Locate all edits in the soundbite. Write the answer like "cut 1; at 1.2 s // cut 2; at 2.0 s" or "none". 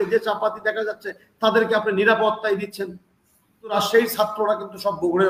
cut 1; at 3.7 s